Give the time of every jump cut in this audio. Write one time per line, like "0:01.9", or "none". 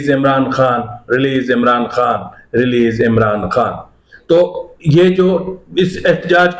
none